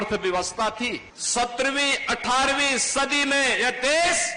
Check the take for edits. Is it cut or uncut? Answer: cut